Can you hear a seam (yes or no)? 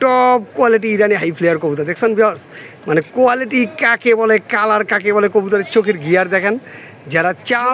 no